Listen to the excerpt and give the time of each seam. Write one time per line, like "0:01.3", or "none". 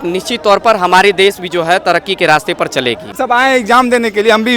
0:03.2